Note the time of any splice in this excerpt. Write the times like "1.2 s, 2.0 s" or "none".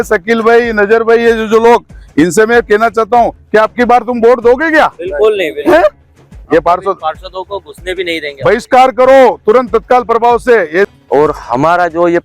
6.3 s, 10.9 s